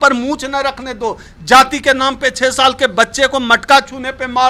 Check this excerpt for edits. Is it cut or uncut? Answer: uncut